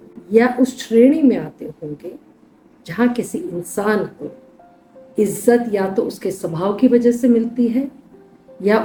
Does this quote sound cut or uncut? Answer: uncut